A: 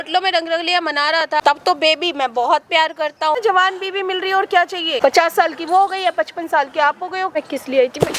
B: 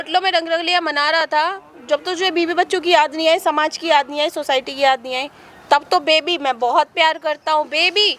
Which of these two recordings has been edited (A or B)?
A